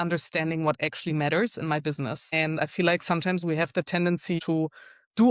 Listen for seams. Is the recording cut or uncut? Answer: cut